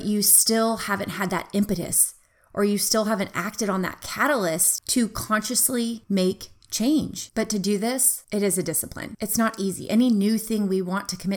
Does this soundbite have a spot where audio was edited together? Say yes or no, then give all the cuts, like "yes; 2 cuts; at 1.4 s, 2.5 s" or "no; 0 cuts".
no; 0 cuts